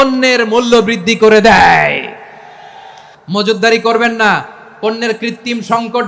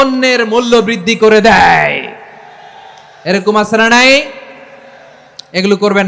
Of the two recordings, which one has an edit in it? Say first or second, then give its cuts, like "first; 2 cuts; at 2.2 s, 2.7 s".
first; 1 cut; at 3.1 s